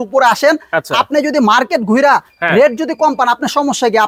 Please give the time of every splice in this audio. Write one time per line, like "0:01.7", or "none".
none